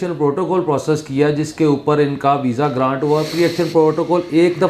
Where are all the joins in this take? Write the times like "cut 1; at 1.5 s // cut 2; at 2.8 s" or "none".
none